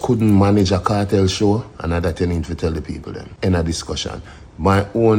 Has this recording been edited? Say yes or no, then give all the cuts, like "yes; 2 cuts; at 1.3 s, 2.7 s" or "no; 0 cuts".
no; 0 cuts